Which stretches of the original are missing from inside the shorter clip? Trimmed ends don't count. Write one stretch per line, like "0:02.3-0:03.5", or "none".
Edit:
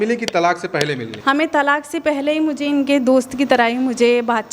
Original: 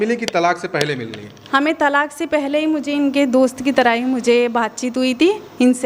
0:01.1-0:01.4